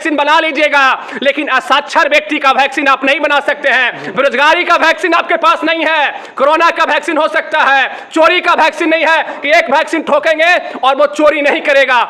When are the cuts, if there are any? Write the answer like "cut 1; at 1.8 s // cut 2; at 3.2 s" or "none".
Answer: none